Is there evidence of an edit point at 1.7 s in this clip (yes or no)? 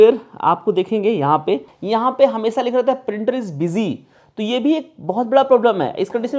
yes